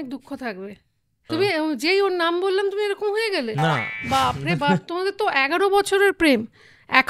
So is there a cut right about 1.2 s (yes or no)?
yes